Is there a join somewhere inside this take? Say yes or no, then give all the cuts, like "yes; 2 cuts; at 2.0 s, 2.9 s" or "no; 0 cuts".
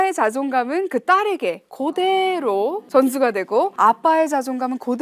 yes; 2 cuts; at 2.8 s, 3.7 s